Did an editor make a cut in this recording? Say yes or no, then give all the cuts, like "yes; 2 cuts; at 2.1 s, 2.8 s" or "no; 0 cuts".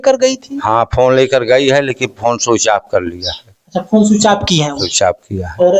no; 0 cuts